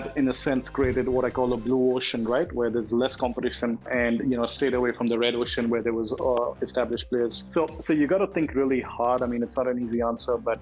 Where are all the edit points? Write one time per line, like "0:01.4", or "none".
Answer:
0:03.8
0:07.4